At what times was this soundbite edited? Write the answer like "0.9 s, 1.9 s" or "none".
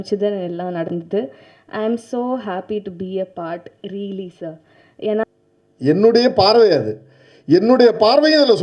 5.2 s